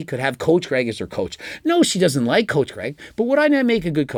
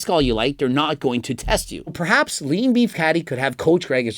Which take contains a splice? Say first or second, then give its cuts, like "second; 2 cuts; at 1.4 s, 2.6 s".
second; 1 cut; at 2.0 s